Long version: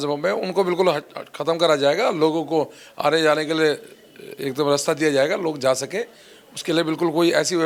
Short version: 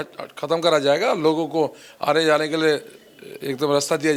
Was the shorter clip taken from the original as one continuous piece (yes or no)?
yes